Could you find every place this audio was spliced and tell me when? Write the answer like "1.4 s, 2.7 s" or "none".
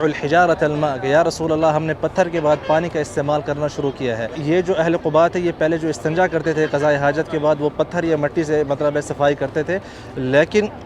4.4 s

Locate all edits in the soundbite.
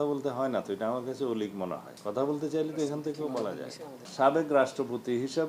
1.9 s, 4.0 s

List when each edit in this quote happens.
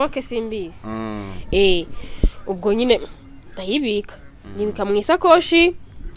none

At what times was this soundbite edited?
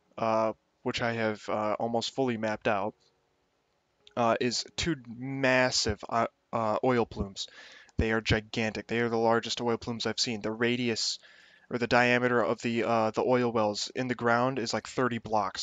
14.6 s

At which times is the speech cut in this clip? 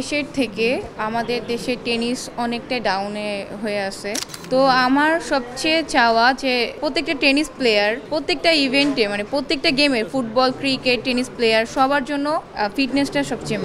4.3 s, 6.7 s, 8.0 s, 12.5 s

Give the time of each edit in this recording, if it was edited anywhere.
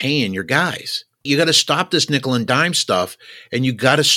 1.2 s

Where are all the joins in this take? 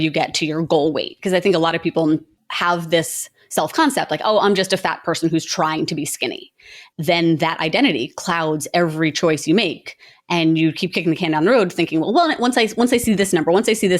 none

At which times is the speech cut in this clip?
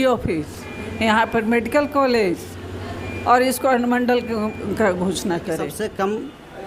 5.7 s

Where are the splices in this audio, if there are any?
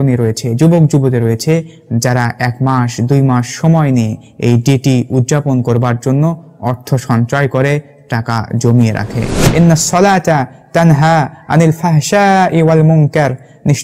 9.4 s

